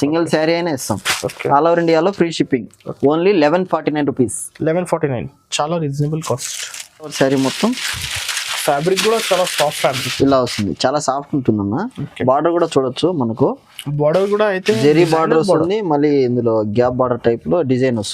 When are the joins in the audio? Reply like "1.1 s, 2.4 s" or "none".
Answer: 7.1 s